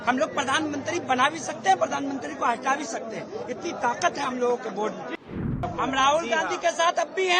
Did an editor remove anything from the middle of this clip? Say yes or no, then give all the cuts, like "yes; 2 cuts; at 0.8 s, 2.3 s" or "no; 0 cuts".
yes; 1 cut; at 5.1 s